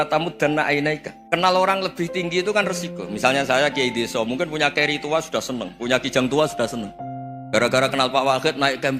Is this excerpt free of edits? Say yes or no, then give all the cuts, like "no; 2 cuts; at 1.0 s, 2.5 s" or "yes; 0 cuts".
no; 1 cut; at 1.1 s